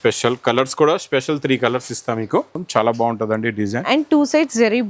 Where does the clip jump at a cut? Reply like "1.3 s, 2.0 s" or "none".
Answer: 2.5 s